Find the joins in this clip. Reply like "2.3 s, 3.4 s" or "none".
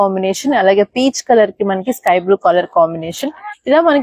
none